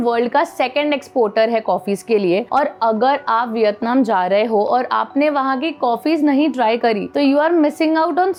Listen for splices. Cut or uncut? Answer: uncut